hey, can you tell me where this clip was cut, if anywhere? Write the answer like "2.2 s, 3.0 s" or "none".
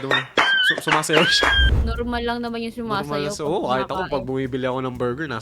1.7 s